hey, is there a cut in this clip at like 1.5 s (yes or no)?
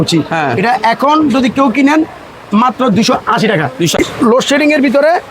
no